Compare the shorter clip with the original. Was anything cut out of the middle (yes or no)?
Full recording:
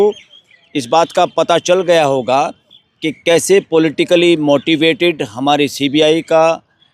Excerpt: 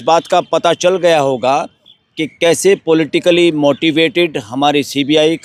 no